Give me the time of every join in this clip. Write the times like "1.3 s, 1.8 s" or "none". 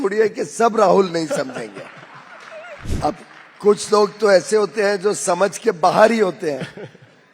2.9 s